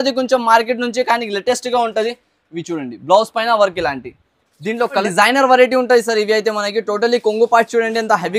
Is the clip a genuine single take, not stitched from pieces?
no; 1 cut; at 5.0 s

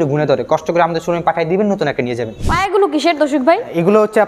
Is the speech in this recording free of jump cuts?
no; 1 cut; at 2.4 s

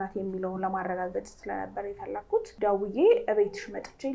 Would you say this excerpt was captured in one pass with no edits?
no; 1 cut; at 2.5 s

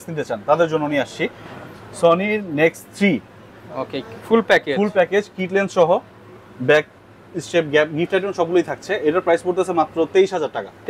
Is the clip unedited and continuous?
yes; 0 cuts

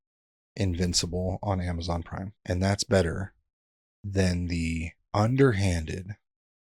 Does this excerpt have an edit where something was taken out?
yes; 2 cuts; at 2.3 s, 4.9 s

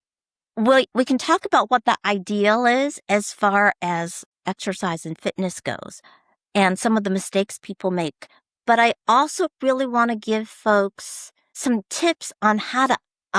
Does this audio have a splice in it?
yes; 2 cuts; at 4.3 s, 11.5 s

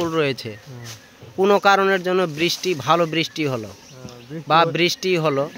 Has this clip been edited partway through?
no; 0 cuts

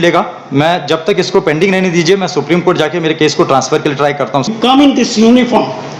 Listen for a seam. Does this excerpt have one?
yes; 1 cut; at 4.5 s

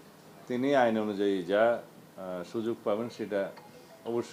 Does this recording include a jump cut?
no; 0 cuts

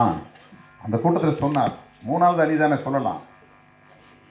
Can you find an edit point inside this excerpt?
no; 0 cuts

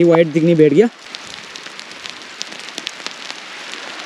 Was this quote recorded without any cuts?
no; 1 cut; at 1.1 s

